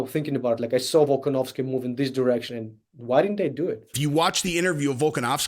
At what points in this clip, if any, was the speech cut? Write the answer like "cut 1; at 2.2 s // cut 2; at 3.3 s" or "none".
cut 1; at 3.9 s